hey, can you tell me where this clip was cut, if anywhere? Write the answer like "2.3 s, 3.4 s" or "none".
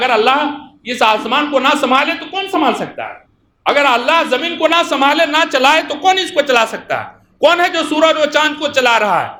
none